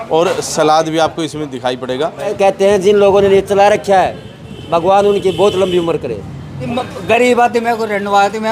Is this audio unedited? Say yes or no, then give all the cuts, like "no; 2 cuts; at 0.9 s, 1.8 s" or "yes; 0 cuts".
no; 2 cuts; at 2.3 s, 6.7 s